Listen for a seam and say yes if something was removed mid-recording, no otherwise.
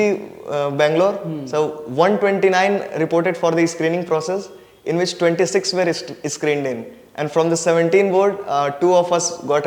no